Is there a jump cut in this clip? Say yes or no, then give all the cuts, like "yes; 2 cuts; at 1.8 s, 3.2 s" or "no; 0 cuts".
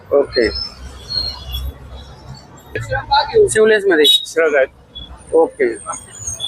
yes; 1 cut; at 2.9 s